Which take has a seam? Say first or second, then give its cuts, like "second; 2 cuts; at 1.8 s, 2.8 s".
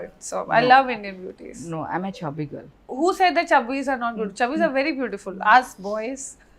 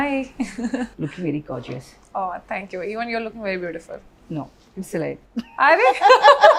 first; 1 cut; at 2.8 s